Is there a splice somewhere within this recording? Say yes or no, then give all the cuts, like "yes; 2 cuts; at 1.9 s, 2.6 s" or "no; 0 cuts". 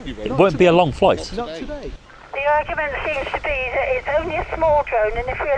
yes; 1 cut; at 2.1 s